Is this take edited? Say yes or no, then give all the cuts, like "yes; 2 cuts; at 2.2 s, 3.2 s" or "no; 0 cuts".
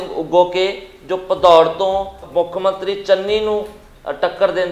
yes; 1 cut; at 2.2 s